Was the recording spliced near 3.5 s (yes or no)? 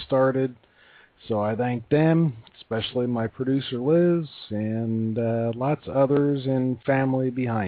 no